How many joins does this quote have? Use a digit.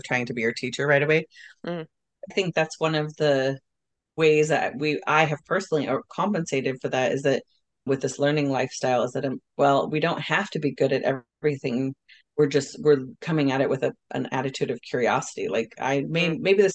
1